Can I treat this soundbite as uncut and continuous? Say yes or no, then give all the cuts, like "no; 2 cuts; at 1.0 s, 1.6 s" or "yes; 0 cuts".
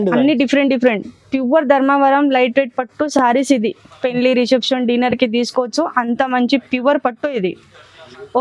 yes; 0 cuts